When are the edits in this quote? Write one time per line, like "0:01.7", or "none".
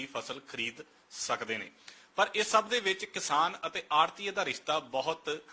0:02.2